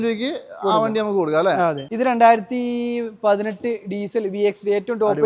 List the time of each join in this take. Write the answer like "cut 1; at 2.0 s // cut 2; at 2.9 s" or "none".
cut 1; at 1.8 s